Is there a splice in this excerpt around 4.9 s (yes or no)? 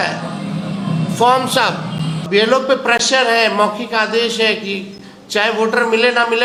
no